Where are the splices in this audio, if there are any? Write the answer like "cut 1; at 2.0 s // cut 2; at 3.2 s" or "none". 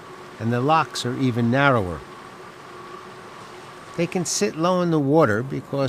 cut 1; at 2.5 s